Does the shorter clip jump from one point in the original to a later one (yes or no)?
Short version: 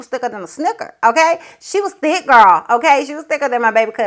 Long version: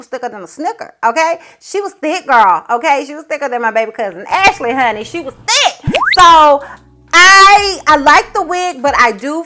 no